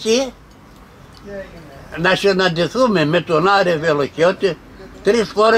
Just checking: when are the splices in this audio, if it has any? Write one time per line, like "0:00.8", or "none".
none